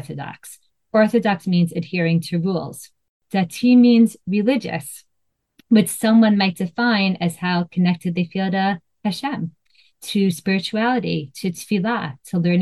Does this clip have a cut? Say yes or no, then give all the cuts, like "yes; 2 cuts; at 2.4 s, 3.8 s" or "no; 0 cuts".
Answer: no; 0 cuts